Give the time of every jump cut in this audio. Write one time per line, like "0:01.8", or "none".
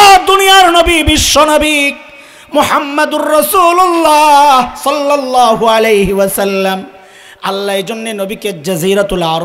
none